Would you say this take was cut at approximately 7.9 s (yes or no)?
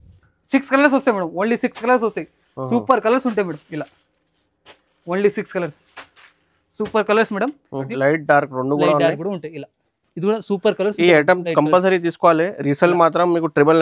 yes